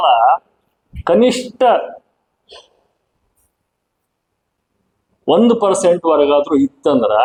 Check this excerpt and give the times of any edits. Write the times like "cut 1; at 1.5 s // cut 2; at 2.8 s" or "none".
none